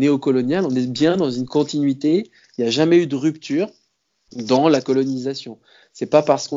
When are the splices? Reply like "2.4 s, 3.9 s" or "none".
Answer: none